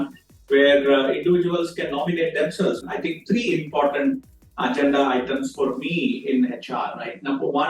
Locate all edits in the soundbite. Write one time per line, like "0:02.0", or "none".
0:02.8